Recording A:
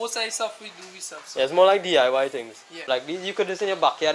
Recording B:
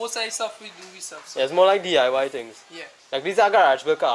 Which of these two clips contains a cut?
A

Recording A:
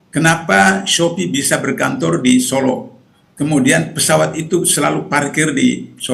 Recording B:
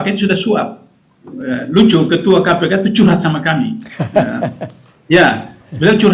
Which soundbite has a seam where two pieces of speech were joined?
B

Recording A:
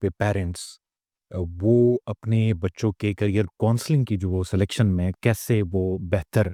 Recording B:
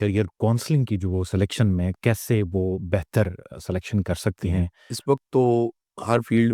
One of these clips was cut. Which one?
B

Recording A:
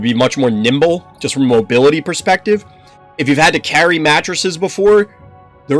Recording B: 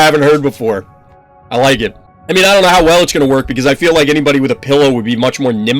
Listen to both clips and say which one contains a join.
B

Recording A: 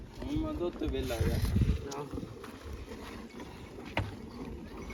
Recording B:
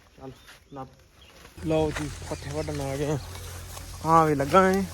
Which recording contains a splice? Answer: B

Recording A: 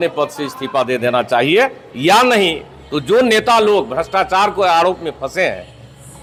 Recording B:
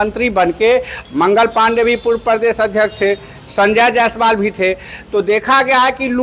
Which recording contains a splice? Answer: B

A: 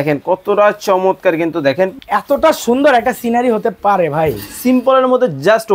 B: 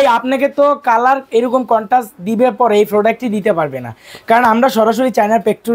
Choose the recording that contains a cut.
A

